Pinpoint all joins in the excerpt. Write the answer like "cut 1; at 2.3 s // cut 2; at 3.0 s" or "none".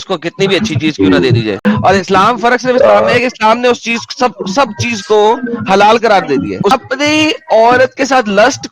cut 1; at 1.6 s // cut 2; at 6.7 s